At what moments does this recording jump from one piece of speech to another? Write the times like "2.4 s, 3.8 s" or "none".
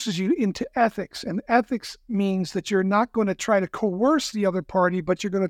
none